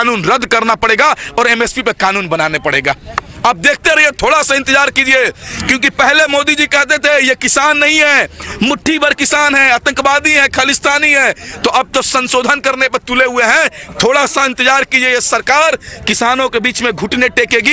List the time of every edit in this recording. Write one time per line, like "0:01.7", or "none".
none

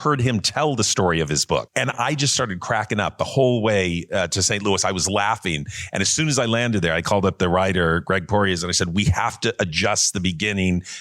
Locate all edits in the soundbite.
0:01.7

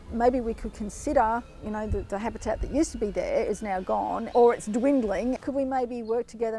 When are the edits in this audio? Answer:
0:01.5
0:04.2
0:05.4

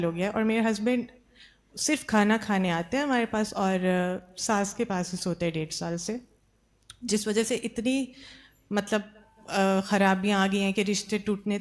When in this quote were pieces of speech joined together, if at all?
none

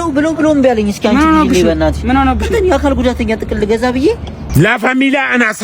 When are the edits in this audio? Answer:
0:04.4

